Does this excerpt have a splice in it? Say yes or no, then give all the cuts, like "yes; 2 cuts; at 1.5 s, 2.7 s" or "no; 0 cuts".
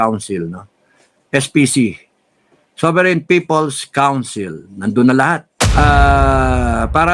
yes; 1 cut; at 5.5 s